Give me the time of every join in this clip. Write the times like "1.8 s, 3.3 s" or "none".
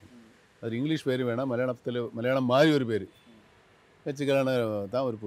none